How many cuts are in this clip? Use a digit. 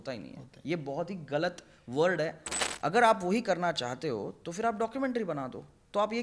1